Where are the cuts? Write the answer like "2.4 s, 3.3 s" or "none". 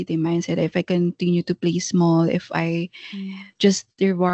none

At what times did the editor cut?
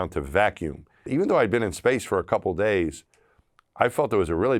0.9 s

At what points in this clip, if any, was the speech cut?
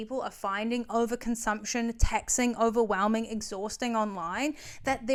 none

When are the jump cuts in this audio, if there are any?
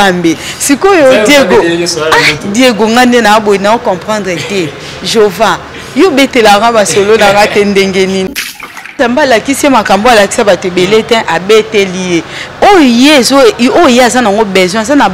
8.8 s

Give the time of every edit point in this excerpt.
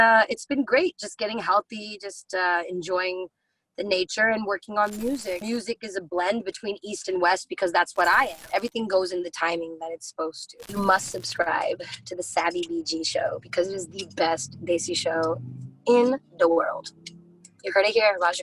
5.4 s, 8.4 s, 10.5 s

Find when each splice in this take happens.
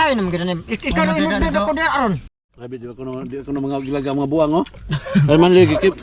2.2 s

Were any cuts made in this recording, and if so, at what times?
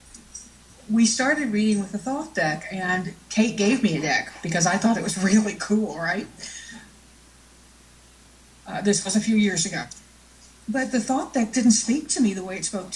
none

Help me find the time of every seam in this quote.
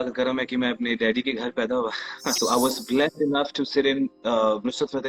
2.4 s

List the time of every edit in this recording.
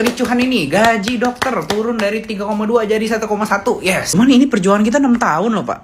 4.1 s

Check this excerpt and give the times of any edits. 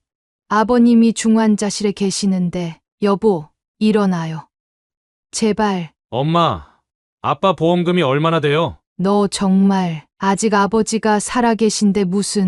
2.8 s, 5.9 s

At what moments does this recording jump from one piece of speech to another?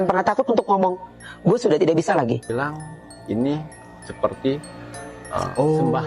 2.5 s

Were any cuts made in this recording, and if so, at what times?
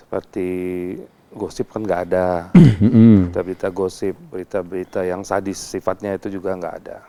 none

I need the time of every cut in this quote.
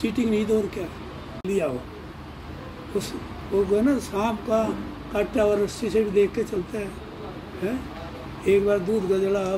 1.4 s

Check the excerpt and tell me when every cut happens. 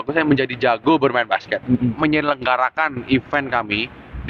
1.9 s

